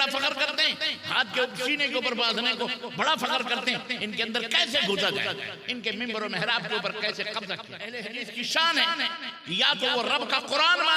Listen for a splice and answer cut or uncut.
cut